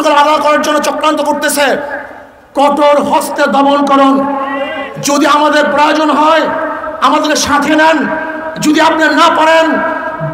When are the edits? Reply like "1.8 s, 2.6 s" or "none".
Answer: none

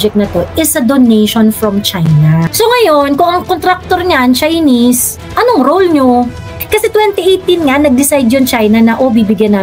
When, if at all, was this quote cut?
2.5 s, 6.5 s

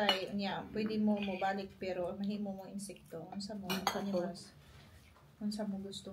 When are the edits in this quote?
none

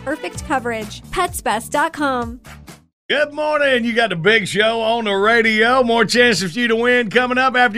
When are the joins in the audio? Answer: 3.0 s

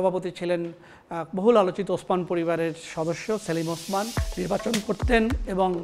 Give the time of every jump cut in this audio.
4.2 s

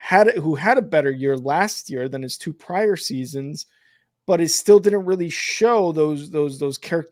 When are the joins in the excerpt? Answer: none

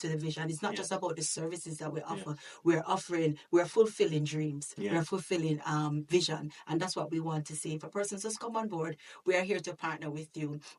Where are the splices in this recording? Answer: none

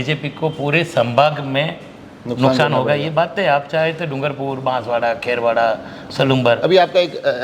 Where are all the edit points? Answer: none

